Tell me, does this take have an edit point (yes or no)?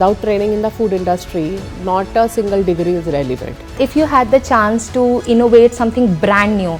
yes